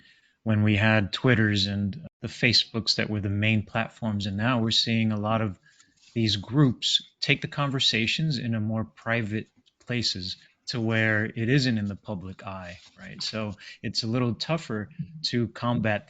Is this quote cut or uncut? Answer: cut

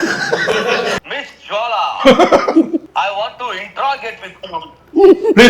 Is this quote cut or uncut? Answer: cut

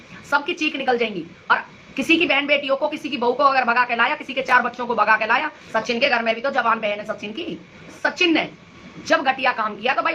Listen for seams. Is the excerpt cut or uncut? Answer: cut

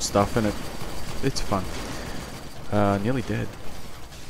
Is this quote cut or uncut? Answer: uncut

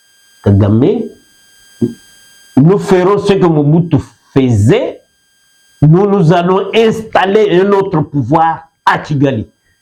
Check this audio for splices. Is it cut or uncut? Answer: uncut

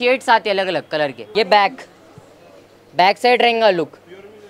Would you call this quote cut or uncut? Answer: uncut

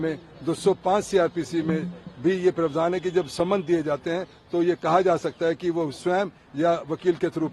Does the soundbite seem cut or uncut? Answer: uncut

